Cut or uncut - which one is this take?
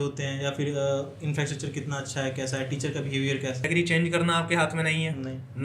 cut